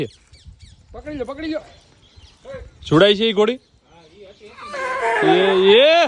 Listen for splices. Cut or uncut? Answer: uncut